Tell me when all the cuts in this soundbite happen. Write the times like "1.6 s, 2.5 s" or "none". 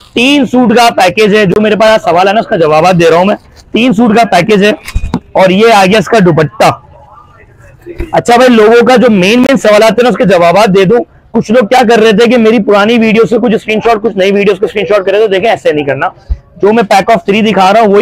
none

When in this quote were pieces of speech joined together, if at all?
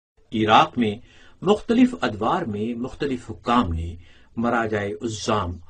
4.2 s

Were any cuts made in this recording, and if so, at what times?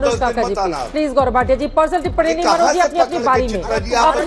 none

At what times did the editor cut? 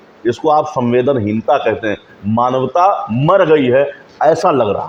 none

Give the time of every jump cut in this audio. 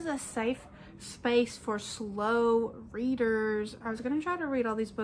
none

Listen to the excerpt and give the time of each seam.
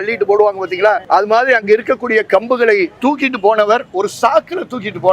1.0 s, 2.9 s

